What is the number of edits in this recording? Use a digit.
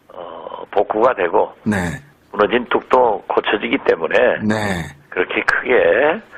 1